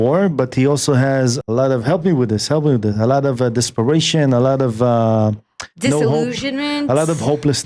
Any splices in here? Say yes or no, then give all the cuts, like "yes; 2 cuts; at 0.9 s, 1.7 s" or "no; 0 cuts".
yes; 1 cut; at 1.4 s